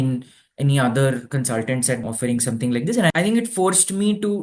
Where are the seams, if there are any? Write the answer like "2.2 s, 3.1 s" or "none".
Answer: 2.0 s, 3.1 s